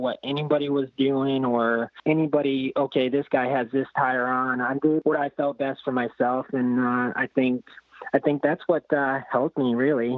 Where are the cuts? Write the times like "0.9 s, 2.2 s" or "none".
2.0 s, 5.0 s